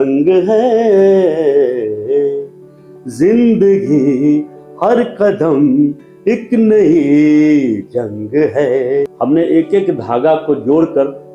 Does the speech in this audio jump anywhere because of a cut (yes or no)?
yes